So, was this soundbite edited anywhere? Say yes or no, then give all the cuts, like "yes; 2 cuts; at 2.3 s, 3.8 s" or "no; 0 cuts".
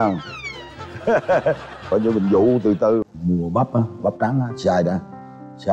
yes; 1 cut; at 3.0 s